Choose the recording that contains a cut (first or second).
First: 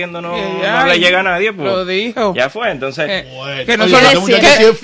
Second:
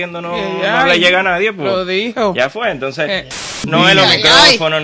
second